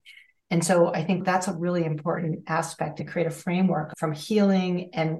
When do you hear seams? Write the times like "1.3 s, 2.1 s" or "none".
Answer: 2.9 s, 3.9 s